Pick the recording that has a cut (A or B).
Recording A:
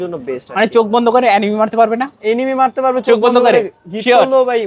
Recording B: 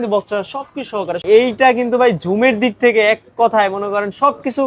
B